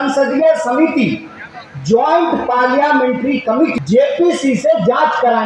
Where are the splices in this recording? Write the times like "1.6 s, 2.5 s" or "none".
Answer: 3.7 s